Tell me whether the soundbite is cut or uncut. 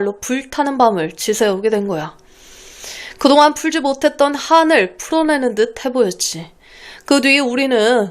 uncut